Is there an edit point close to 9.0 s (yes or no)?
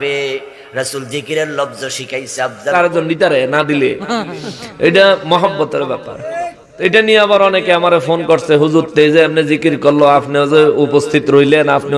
no